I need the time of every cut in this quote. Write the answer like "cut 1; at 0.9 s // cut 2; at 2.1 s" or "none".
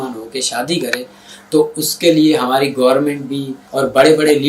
cut 1; at 3.6 s